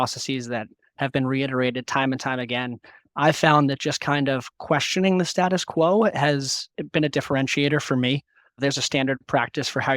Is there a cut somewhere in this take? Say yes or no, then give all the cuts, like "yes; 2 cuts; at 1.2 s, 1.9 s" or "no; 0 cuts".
yes; 2 cuts; at 6.7 s, 8.6 s